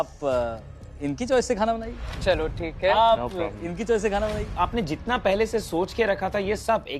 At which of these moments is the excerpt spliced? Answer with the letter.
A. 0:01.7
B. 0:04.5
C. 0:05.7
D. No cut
B